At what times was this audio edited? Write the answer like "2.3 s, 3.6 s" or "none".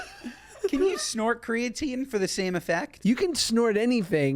2.9 s